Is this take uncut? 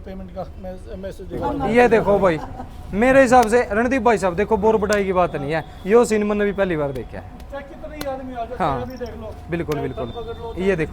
no; 1 cut; at 1.4 s

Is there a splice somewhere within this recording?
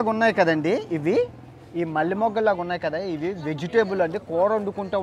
no; 0 cuts

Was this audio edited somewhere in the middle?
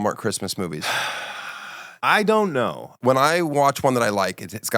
yes; 1 cut; at 2.9 s

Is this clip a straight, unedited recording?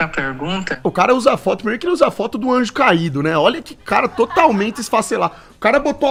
yes; 0 cuts

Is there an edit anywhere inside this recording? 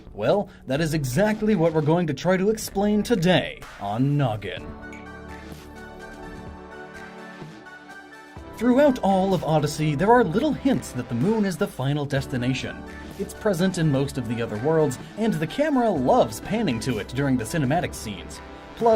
no; 0 cuts

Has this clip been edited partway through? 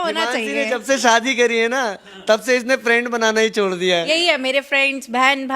yes; 1 cut; at 4.1 s

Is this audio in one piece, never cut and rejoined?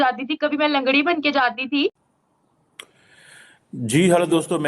no; 1 cut; at 2.1 s

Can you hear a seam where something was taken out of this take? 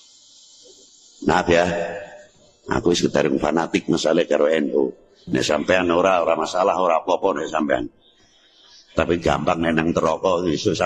no; 0 cuts

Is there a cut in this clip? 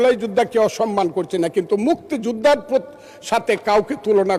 no; 0 cuts

